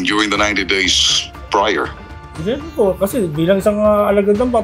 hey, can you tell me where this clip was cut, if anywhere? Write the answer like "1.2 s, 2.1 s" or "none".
2.1 s